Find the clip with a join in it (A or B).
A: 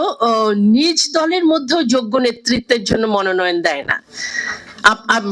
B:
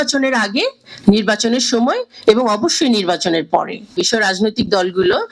B